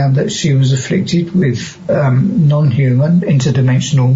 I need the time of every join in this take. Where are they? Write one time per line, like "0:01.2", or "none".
none